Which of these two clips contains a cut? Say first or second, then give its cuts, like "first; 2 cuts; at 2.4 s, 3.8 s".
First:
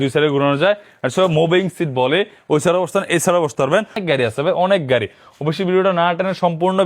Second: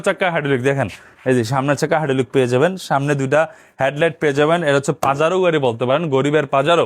first; 1 cut; at 4.0 s